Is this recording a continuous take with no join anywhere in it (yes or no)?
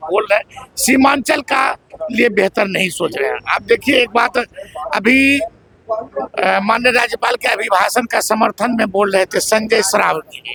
yes